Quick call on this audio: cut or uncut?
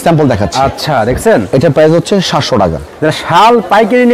uncut